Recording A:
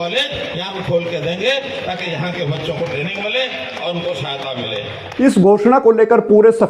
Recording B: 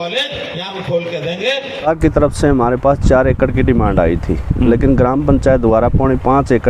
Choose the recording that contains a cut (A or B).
B